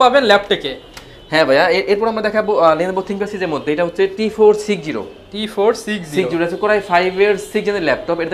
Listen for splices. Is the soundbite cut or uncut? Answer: uncut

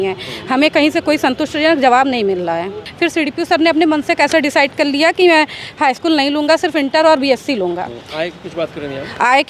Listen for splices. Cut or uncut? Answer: cut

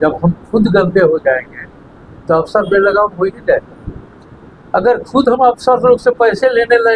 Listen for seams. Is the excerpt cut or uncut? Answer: uncut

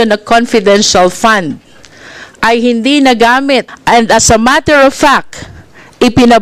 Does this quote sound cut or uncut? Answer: cut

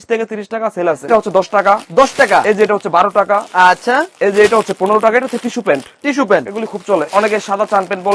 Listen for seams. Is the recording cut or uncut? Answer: cut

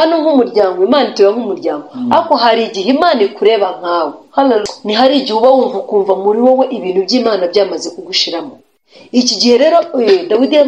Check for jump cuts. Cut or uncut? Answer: cut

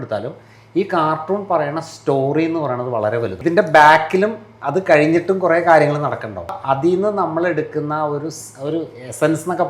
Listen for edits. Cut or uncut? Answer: cut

